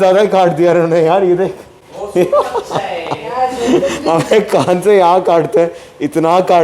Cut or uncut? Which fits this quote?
uncut